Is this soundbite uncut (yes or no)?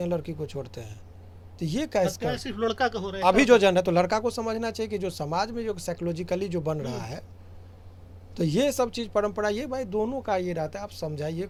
yes